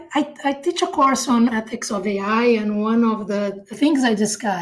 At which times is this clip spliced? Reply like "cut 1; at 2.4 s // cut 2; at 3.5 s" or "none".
cut 1; at 1.6 s // cut 2; at 3.7 s